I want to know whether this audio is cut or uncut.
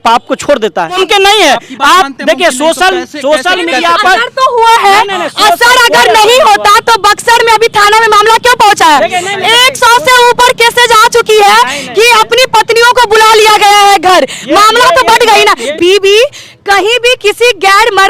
cut